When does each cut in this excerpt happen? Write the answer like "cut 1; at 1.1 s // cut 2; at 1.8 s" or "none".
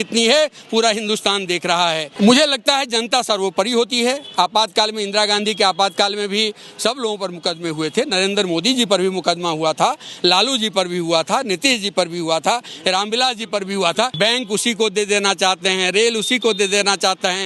cut 1; at 2.1 s // cut 2; at 14.1 s